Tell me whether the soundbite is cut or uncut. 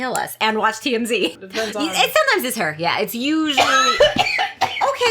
cut